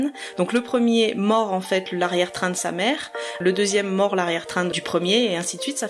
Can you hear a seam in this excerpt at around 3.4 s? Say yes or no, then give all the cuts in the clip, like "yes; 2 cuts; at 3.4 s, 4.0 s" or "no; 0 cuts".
yes; 1 cut; at 3.4 s